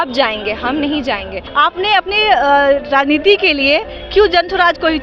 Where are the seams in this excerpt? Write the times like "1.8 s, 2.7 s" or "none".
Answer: 1.4 s